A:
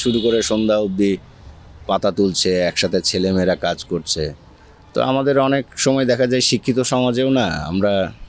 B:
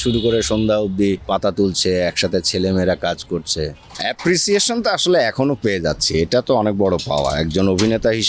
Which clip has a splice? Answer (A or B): B